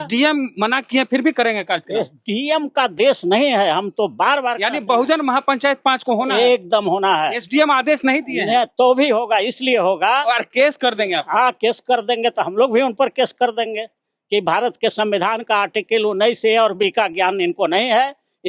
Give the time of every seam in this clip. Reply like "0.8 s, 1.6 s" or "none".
none